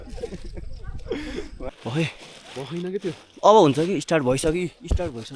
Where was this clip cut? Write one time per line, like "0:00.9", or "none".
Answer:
0:01.7